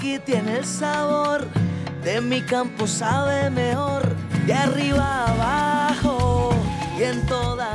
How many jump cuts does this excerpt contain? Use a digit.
0